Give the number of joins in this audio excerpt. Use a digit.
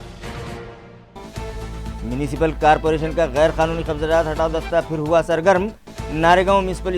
1